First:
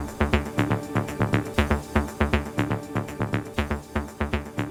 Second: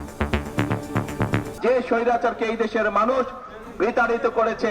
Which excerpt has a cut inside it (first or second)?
second